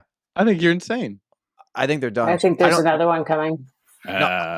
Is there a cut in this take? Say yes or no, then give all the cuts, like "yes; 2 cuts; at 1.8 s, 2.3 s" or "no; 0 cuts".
no; 0 cuts